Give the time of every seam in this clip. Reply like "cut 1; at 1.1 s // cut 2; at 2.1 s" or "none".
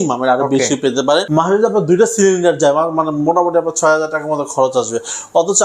cut 1; at 1.3 s